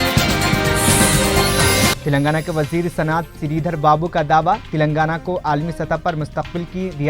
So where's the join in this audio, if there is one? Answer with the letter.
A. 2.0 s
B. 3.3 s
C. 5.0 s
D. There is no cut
A